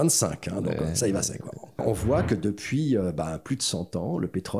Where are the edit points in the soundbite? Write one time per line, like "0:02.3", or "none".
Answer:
0:01.8